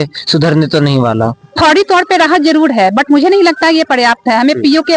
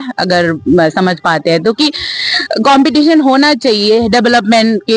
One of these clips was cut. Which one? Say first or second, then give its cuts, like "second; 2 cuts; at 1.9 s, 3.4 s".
first; 1 cut; at 1.4 s